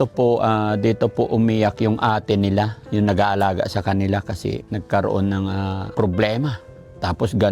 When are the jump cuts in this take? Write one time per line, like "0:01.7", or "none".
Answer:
0:04.7
0:05.9